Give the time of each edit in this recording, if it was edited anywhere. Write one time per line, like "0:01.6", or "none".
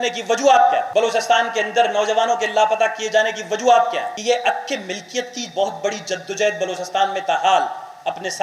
0:00.9
0:04.1